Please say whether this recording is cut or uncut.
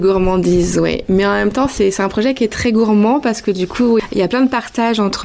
uncut